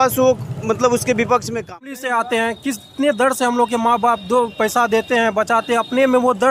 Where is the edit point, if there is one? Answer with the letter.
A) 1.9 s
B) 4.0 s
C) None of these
A